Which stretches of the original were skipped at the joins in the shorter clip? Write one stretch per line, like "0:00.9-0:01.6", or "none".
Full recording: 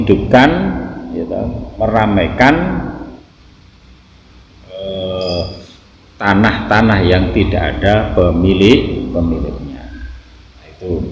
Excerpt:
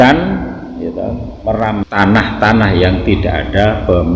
0:02.2-0:06.1